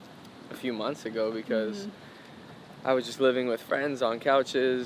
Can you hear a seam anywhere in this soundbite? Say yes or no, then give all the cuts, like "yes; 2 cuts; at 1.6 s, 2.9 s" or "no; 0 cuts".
no; 0 cuts